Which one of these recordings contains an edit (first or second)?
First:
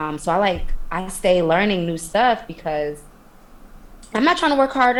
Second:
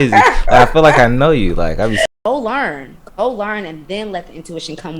second